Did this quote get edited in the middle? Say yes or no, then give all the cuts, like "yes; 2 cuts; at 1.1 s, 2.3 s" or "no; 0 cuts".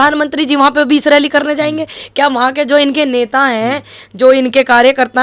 no; 0 cuts